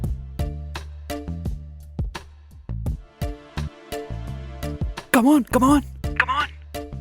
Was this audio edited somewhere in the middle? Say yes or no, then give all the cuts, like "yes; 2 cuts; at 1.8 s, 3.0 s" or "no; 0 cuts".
yes; 1 cut; at 1.3 s